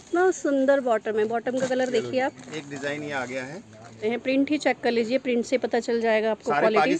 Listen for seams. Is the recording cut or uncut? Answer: cut